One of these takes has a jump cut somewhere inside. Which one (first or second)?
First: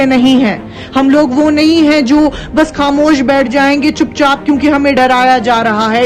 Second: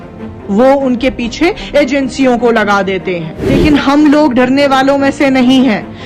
second